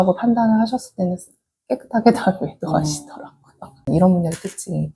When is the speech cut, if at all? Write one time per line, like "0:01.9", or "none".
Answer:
0:03.9